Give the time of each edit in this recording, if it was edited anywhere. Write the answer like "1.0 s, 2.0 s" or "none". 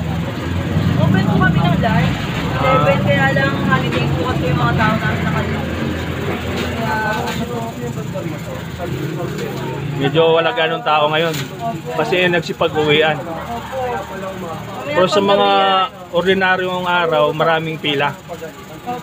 none

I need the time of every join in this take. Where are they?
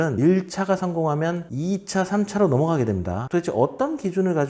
3.3 s

